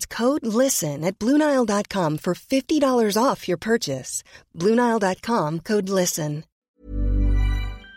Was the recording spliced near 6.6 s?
yes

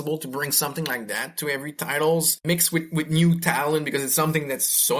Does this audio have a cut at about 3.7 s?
no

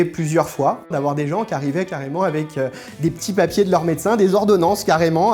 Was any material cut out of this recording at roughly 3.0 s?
no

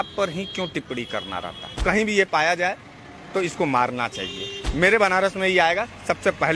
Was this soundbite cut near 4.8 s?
no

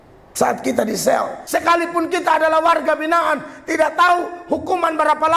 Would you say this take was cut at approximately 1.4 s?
yes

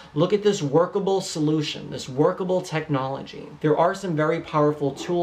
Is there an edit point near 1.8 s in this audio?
no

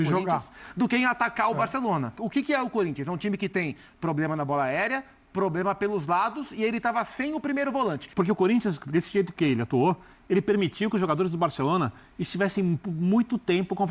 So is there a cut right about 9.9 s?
no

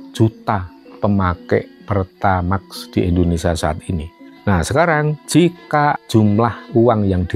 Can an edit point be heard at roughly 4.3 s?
yes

